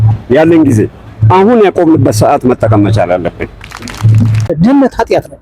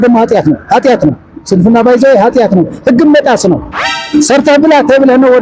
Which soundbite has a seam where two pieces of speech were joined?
first; 1 cut; at 4.5 s

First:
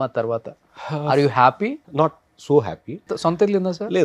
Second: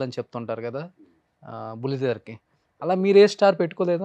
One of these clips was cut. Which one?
first; 2 cuts; at 1.8 s, 3.1 s

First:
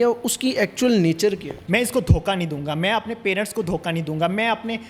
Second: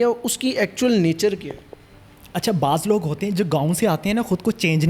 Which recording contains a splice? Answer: first; 1 cut; at 1.5 s

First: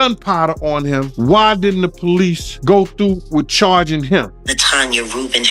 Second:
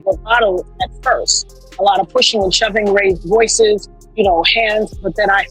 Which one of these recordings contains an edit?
first; 3 cuts; at 1.1 s, 2.5 s, 4.4 s

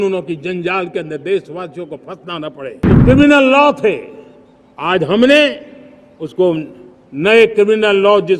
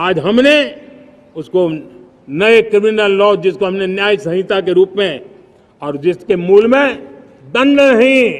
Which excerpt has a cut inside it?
first; 1 cut; at 2.9 s

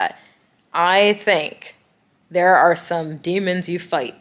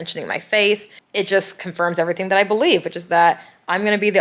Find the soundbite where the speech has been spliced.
second; 1 cut; at 1.0 s

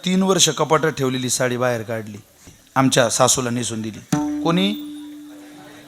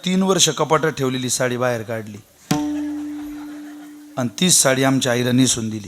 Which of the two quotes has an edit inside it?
first; 1 cut; at 2.4 s

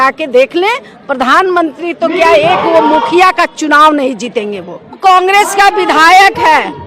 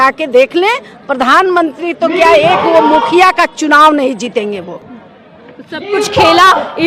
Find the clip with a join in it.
first; 1 cut; at 5.0 s

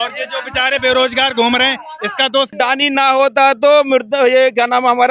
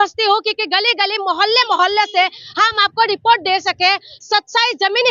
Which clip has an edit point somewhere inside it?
first; 1 cut; at 2.5 s

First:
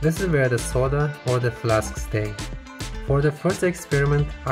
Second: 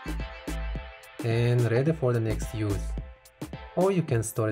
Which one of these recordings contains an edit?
second; 1 cut; at 1.2 s

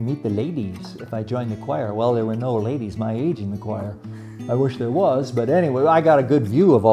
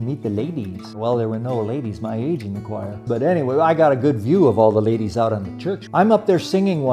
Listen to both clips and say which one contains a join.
second; 3 cuts; at 1.0 s, 3.0 s, 5.8 s

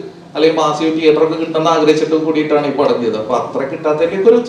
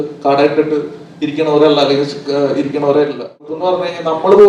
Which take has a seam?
second; 1 cut; at 3.6 s

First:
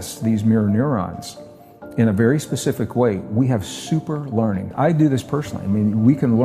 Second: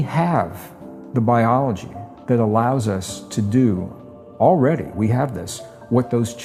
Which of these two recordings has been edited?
first; 1 cut; at 4.7 s

